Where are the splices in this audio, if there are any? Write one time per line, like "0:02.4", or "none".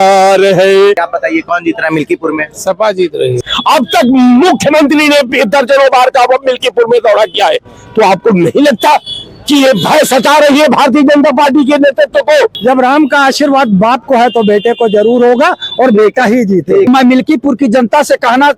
0:01.1
0:03.5
0:12.6
0:16.9